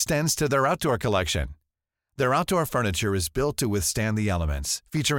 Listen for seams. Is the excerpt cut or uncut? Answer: uncut